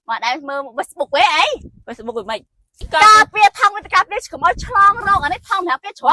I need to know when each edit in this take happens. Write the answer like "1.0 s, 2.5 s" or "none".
2.9 s